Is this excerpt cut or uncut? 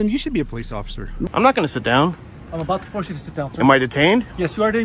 cut